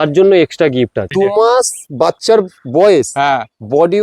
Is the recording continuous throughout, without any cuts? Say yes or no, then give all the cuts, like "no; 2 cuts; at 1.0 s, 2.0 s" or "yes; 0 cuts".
no; 1 cut; at 1.1 s